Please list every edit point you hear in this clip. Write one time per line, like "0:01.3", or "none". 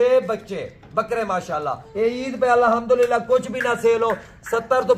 0:01.8